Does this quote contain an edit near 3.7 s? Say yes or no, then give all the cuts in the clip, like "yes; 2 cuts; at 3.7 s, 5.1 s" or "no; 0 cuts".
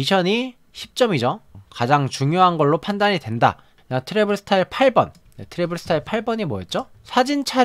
yes; 1 cut; at 3.7 s